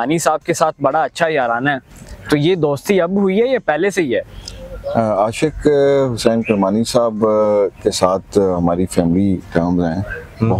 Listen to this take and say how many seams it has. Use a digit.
0